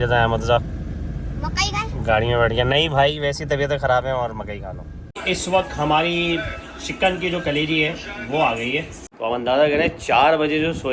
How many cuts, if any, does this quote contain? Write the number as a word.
two